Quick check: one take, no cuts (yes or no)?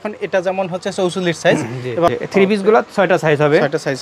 no